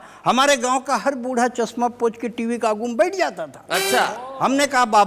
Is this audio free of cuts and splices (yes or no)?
yes